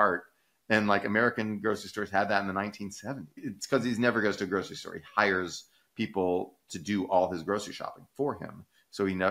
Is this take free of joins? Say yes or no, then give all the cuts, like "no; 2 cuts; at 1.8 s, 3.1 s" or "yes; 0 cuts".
no; 1 cut; at 3.5 s